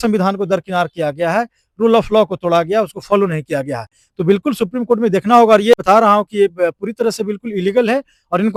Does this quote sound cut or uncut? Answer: uncut